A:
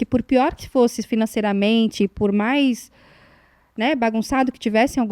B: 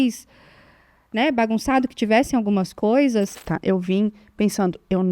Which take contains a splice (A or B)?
B